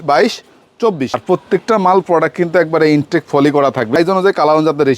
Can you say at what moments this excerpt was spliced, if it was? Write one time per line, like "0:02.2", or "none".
0:01.2
0:04.0